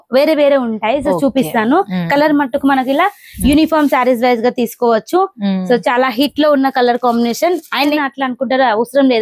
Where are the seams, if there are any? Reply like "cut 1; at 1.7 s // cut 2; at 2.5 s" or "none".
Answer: cut 1; at 7.9 s